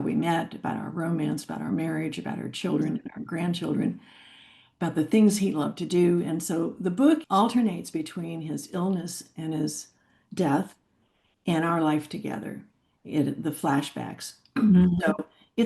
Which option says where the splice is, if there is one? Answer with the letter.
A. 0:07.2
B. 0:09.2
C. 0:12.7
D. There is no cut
A